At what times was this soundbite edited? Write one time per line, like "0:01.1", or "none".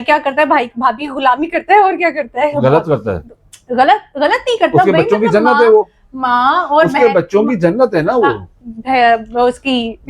none